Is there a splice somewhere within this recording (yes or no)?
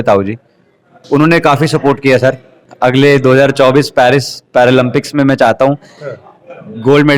yes